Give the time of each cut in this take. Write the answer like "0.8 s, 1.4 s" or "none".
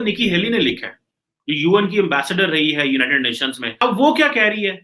3.8 s